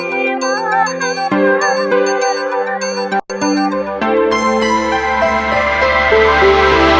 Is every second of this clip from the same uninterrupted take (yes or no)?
yes